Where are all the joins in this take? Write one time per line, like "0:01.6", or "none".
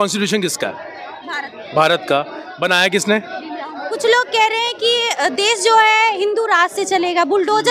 0:03.9

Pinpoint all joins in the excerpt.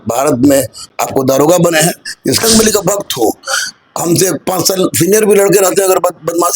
0:00.9
0:02.4

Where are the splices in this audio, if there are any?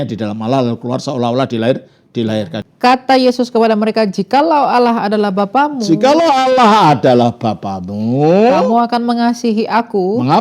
0:02.6

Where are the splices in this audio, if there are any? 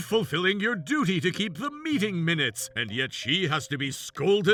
none

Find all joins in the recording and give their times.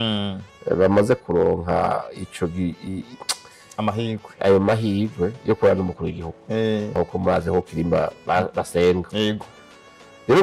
0:07.0

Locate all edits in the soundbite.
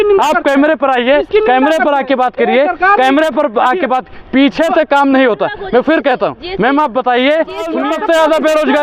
0:07.8

